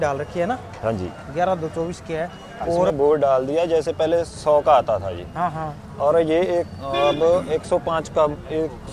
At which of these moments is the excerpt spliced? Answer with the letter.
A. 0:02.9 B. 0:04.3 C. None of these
A